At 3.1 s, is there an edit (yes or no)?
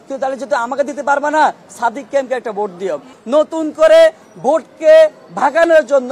yes